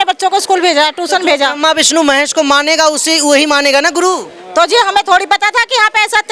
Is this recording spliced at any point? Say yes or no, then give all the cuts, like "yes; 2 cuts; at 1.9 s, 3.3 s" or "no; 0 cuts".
no; 0 cuts